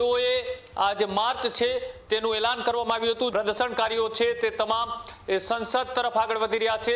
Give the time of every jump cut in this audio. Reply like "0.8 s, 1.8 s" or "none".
3.3 s